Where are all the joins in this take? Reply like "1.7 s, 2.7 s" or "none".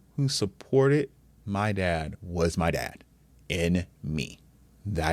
2.1 s

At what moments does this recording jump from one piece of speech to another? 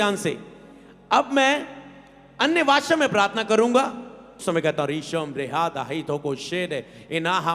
4.4 s

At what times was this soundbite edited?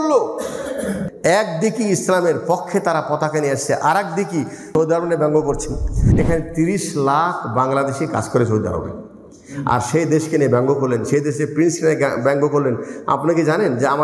1.0 s, 4.7 s, 6.0 s

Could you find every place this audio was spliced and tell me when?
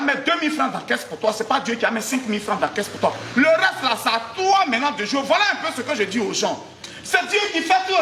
none

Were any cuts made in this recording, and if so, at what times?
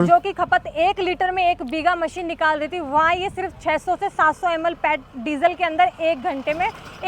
none

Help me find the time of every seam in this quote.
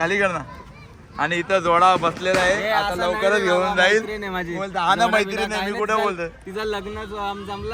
none

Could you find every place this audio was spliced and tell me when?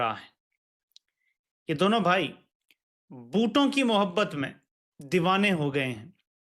none

